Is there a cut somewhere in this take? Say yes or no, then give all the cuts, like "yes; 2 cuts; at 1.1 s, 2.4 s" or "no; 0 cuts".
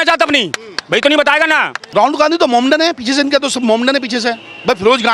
yes; 1 cut; at 1.8 s